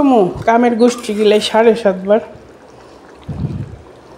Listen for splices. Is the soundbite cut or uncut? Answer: uncut